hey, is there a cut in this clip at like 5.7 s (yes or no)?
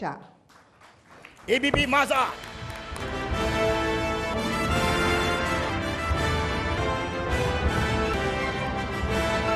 yes